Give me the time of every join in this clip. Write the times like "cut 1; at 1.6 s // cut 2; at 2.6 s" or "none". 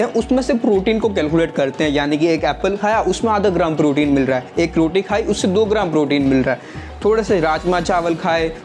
none